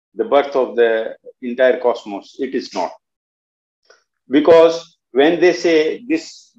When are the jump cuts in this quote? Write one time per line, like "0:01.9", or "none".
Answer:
none